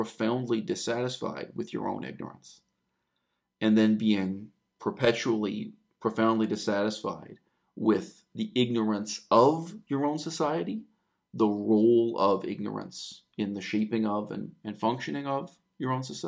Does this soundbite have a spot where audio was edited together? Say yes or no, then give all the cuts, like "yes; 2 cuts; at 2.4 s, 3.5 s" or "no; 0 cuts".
no; 0 cuts